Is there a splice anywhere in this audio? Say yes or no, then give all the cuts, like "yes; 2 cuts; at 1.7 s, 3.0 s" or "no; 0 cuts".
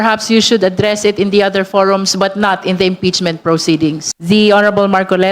yes; 1 cut; at 4.1 s